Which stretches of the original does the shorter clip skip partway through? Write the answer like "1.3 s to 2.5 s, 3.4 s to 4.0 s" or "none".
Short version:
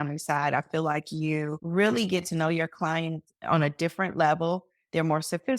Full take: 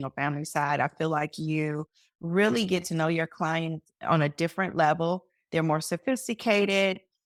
1.9 s to 2.2 s